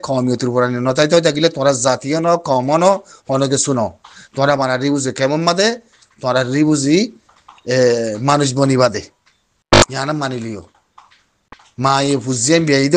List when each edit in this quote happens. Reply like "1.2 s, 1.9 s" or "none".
none